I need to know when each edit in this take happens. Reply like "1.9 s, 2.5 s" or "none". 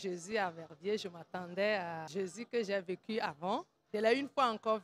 2.0 s, 3.8 s